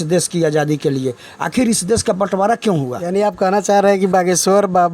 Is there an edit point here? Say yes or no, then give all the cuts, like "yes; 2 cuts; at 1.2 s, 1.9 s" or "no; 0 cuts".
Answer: yes; 1 cut; at 3.0 s